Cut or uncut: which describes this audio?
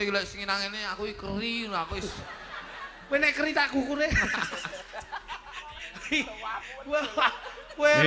uncut